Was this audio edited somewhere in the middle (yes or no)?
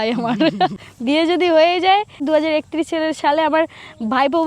yes